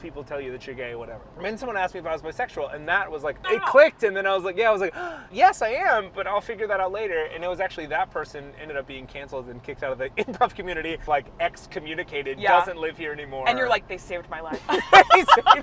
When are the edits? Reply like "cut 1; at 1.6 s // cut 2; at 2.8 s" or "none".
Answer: cut 1; at 1.3 s // cut 2; at 3.7 s // cut 3; at 5.3 s // cut 4; at 11.0 s